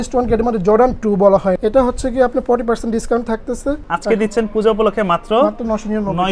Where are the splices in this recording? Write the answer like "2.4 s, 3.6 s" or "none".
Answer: 1.6 s, 3.9 s